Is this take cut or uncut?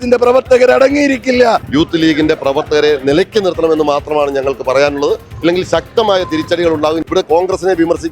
cut